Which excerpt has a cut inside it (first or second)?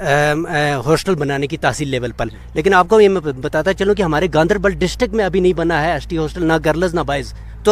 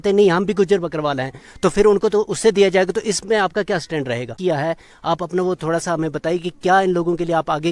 second